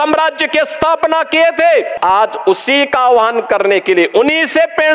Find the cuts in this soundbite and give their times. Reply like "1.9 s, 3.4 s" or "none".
1.9 s